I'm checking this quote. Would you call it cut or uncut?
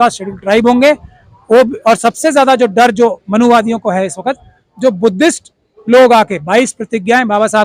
uncut